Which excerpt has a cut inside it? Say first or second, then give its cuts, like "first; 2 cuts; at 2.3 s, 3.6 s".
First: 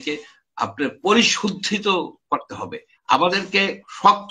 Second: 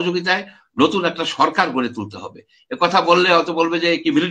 first; 1 cut; at 2.9 s